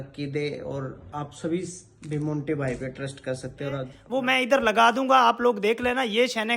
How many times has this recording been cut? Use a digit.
1